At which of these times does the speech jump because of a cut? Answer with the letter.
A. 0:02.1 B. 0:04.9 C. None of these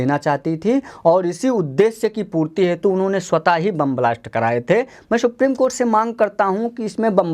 C